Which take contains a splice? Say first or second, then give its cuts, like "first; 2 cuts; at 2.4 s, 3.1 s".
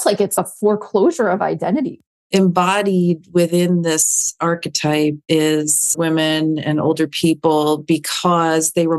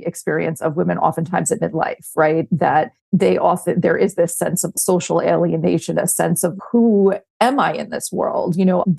first; 1 cut; at 2.0 s